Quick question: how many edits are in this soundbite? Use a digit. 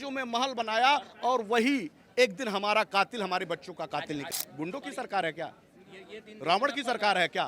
1